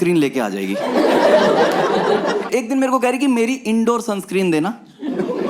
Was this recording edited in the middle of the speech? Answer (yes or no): yes